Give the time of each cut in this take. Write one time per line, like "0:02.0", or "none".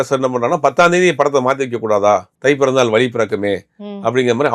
0:02.3